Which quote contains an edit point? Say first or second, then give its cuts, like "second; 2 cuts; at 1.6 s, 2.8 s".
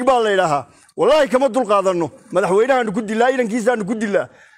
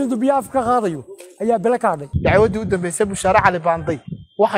second; 1 cut; at 2.1 s